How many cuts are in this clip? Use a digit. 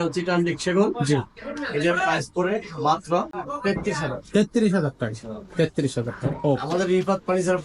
1